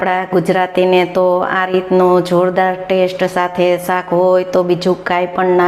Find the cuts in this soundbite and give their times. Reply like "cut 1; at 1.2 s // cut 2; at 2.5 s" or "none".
none